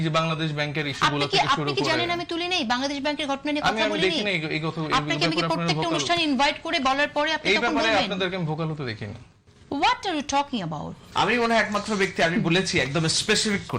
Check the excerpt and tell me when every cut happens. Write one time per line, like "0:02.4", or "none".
0:11.0